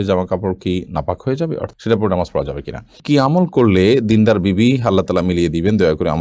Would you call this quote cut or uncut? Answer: cut